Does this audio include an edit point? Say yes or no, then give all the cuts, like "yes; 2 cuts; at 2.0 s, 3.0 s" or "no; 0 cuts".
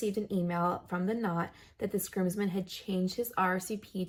no; 0 cuts